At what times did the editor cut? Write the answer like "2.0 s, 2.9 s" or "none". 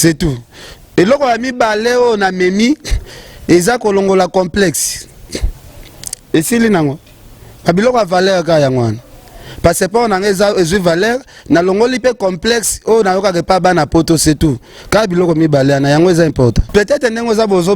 16.6 s